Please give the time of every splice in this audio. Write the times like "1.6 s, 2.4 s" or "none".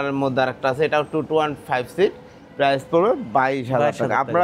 none